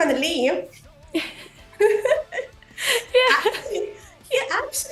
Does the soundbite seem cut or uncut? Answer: uncut